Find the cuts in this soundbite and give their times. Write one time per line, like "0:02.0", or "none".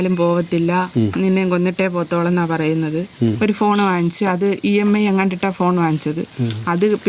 0:03.4